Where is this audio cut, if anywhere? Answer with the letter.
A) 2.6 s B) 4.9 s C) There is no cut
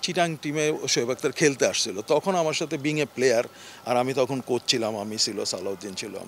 C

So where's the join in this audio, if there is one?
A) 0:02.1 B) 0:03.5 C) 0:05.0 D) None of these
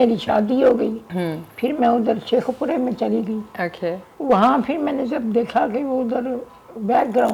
D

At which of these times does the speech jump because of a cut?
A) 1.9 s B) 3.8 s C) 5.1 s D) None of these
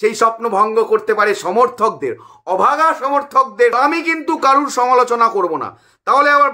B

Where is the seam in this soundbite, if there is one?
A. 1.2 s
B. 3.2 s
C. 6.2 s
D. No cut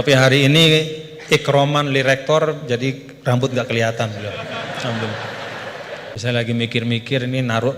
C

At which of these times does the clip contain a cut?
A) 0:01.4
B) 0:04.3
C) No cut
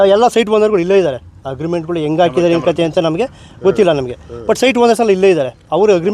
C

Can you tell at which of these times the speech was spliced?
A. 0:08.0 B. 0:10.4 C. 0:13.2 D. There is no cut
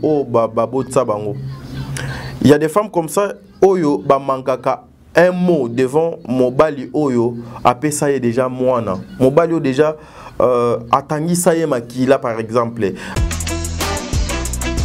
C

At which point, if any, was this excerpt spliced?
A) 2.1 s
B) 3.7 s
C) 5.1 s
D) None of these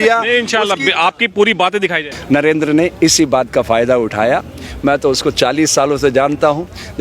A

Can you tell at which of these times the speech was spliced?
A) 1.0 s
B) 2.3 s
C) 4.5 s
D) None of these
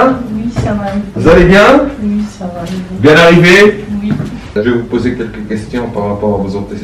C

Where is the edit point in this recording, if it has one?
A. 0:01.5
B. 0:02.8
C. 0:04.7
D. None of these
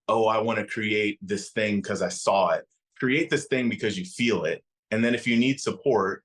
C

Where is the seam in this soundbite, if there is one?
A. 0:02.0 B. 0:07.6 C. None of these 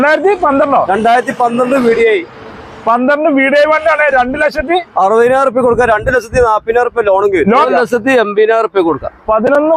B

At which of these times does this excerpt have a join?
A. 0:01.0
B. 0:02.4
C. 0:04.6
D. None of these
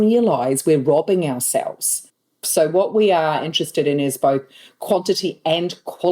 B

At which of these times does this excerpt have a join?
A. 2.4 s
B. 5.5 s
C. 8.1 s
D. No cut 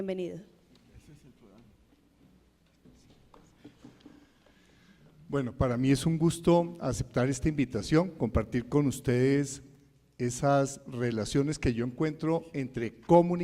B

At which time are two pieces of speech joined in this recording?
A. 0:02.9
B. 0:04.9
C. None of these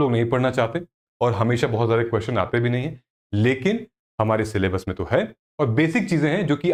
C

